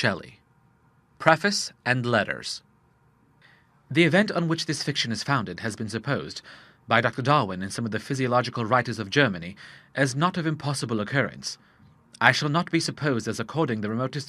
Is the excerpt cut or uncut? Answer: uncut